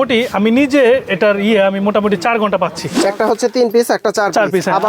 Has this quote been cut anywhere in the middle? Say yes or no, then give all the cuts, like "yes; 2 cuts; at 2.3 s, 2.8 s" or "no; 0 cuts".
yes; 1 cut; at 2.9 s